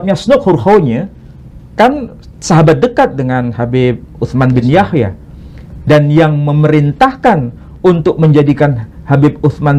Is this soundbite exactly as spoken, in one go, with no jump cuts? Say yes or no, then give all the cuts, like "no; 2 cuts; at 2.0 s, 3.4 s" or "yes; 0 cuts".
yes; 0 cuts